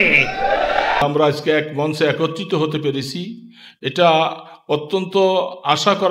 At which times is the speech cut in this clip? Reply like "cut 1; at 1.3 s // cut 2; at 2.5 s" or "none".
cut 1; at 1.0 s